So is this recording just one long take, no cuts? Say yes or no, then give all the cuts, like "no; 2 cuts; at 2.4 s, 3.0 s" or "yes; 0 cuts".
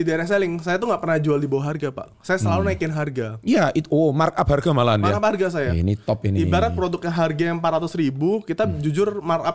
yes; 0 cuts